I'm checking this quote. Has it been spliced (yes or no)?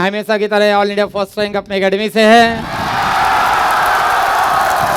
no